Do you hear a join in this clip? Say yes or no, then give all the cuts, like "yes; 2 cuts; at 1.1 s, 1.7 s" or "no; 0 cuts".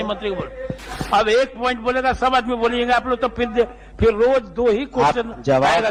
no; 0 cuts